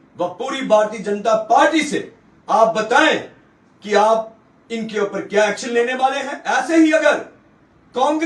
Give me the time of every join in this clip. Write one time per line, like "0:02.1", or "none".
0:06.3